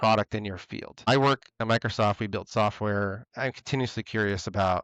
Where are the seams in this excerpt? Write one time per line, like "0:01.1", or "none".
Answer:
0:01.1
0:03.2

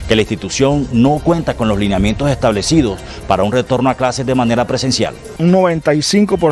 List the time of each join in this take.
0:05.3

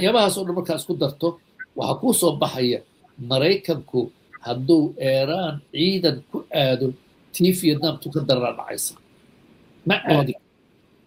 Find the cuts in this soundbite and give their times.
none

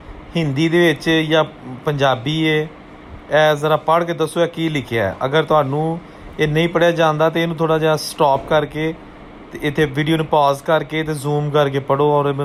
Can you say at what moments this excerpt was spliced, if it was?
none

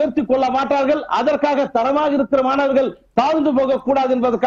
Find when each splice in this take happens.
none

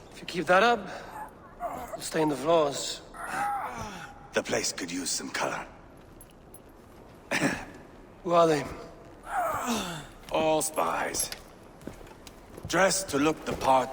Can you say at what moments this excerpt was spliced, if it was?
none

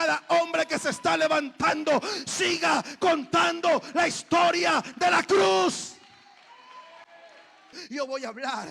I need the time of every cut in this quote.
0:07.8

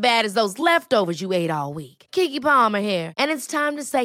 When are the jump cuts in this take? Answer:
none

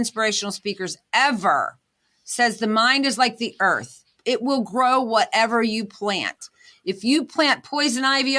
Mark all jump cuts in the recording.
none

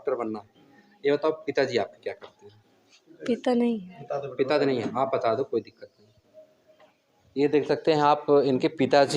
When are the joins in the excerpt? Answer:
none

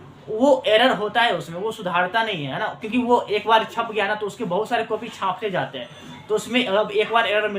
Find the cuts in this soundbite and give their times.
none

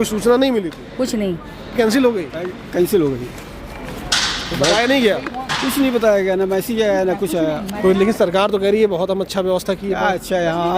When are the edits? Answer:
0:01.7
0:07.7

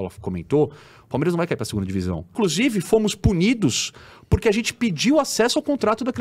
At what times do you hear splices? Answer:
0:02.3

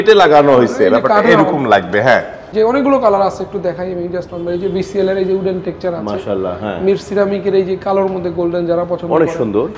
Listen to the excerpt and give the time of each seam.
0:02.4

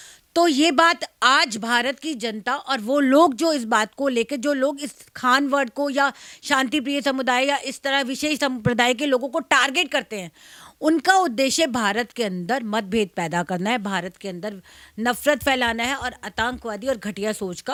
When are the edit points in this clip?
none

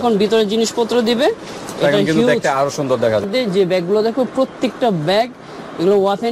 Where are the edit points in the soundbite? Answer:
0:03.2

